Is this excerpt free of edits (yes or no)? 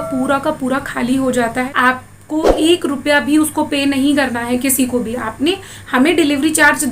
no